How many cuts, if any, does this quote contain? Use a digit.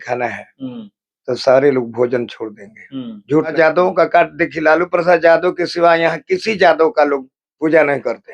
1